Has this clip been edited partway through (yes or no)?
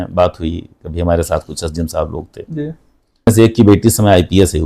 yes